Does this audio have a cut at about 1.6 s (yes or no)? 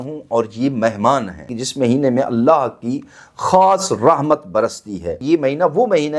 yes